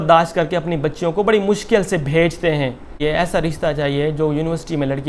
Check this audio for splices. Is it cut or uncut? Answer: cut